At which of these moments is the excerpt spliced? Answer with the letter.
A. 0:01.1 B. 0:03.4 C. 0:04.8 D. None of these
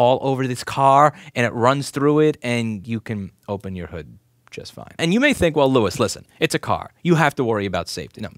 C